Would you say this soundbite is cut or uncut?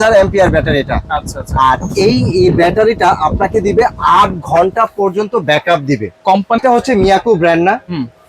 cut